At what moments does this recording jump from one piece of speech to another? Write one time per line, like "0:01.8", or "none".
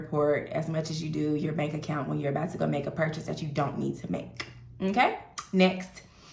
none